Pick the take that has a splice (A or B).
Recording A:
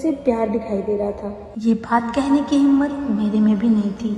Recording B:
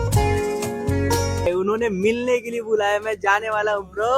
B